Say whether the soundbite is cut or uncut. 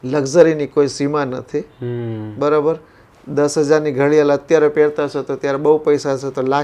uncut